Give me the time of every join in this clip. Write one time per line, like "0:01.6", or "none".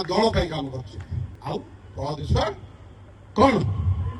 0:01.2